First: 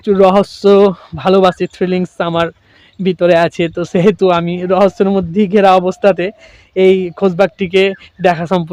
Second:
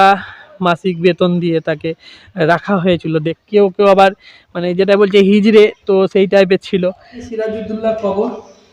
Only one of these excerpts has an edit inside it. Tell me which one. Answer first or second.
second